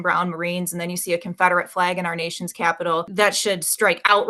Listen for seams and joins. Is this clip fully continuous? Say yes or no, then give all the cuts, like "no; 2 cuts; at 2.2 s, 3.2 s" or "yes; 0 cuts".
no; 1 cut; at 3.1 s